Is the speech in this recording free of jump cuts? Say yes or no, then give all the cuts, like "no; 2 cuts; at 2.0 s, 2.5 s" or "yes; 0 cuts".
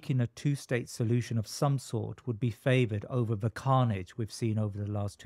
yes; 0 cuts